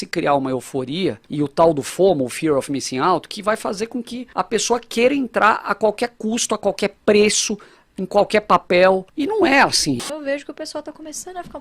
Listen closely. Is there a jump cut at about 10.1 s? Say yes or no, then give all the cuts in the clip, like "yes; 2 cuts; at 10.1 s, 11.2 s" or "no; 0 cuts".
yes; 4 cuts; at 1.2 s, 4.2 s, 9.1 s, 10.1 s